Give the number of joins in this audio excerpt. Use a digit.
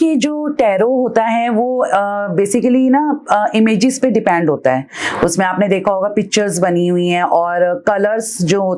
0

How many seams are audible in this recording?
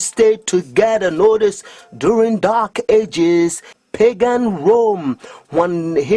1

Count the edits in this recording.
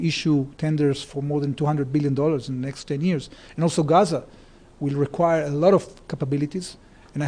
0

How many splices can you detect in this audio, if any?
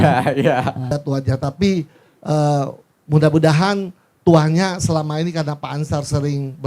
1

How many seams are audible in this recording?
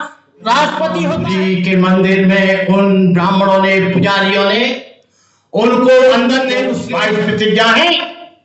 2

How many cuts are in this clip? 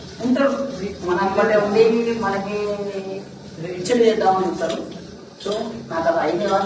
0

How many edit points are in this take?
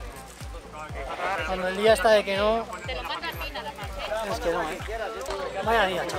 1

